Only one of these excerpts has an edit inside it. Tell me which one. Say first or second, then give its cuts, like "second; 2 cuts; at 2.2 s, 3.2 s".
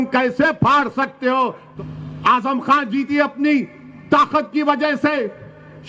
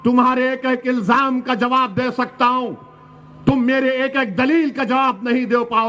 first; 1 cut; at 1.6 s